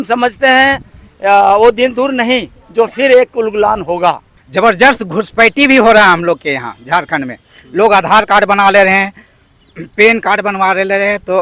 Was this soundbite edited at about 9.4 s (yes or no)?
no